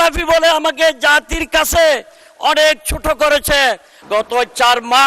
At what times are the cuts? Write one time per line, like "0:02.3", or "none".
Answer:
0:03.9